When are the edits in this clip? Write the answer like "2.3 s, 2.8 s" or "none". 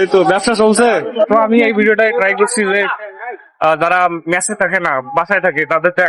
1.3 s